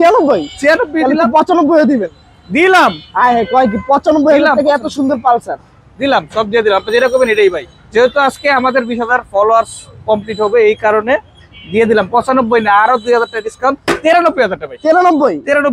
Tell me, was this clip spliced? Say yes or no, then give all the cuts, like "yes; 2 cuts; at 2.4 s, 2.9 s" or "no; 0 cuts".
no; 0 cuts